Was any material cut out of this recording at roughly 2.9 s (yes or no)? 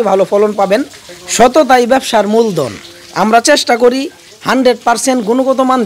no